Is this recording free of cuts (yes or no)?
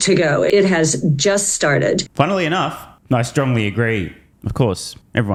yes